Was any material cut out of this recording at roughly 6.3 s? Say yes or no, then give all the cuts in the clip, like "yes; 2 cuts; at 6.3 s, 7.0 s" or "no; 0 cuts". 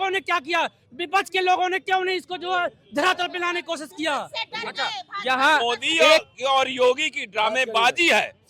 yes; 1 cut; at 6.3 s